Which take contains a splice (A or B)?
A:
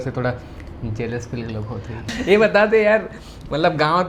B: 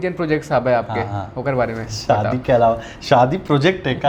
A